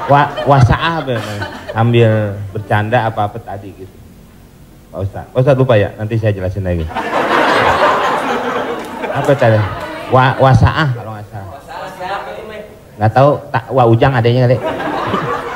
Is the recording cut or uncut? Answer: uncut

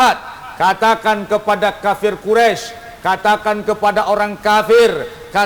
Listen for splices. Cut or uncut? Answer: uncut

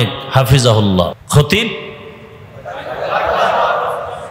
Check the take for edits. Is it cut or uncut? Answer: cut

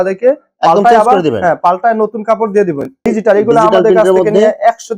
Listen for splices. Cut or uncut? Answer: cut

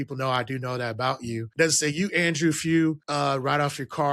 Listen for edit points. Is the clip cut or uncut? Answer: cut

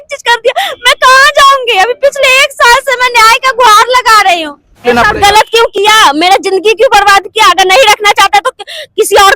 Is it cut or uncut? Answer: cut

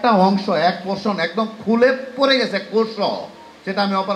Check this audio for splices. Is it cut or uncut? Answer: uncut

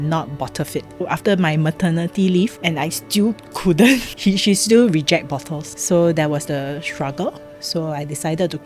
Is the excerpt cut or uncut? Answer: cut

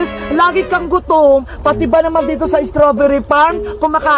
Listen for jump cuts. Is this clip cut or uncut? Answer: uncut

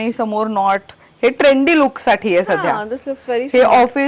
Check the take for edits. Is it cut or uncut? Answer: uncut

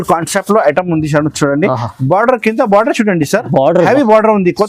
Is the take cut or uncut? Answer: uncut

